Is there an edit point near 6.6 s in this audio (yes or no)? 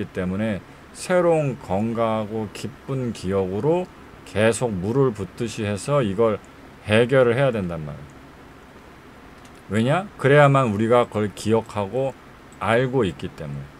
no